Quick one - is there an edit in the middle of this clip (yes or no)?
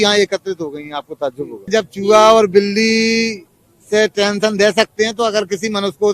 yes